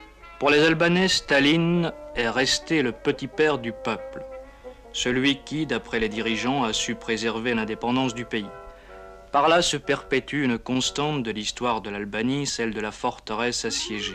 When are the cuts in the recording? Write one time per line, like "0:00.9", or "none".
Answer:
0:13.1